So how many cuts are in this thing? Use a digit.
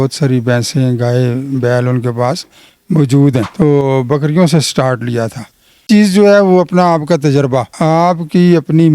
1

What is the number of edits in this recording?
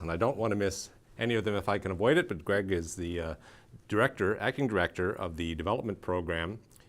1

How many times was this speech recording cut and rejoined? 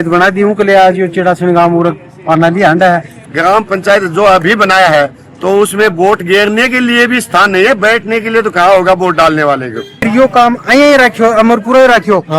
2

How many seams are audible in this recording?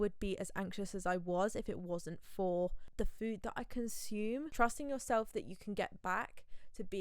2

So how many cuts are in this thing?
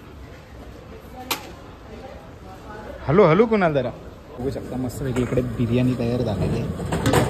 1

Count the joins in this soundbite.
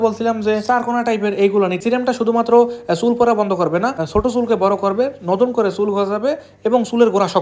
2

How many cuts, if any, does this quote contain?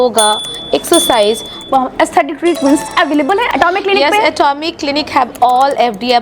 2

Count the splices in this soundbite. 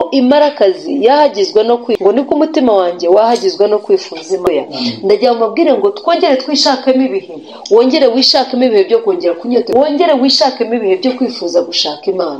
3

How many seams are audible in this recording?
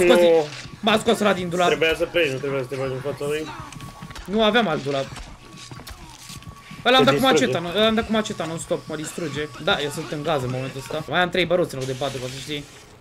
2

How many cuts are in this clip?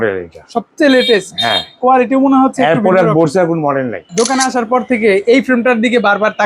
1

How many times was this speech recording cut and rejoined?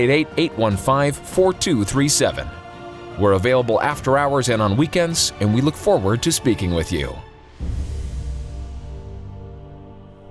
1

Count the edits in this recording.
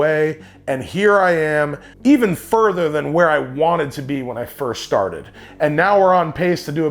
2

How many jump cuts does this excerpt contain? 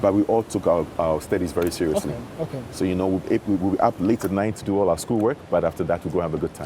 0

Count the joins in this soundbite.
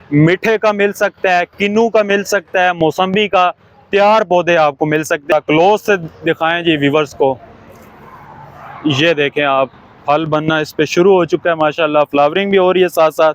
1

